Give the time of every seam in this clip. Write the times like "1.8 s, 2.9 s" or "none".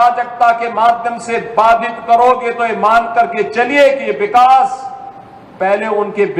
none